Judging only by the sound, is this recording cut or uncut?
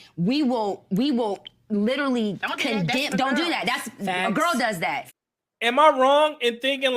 cut